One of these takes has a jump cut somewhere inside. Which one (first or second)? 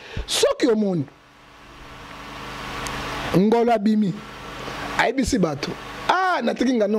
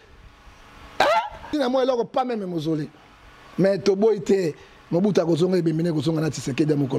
second